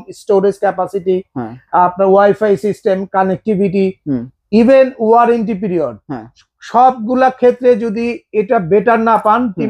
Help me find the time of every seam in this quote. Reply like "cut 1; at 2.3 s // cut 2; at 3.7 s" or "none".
none